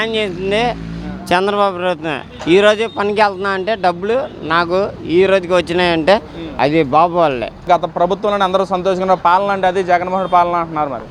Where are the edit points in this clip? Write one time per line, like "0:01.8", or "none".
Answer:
0:06.4
0:07.6